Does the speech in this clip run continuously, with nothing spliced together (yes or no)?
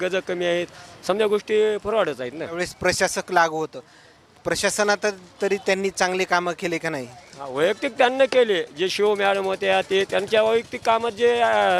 no